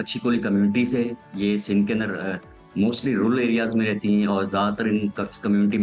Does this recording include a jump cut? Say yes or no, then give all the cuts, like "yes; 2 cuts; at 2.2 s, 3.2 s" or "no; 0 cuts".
no; 0 cuts